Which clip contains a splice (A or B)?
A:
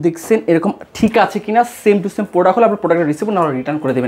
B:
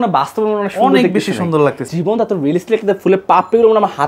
B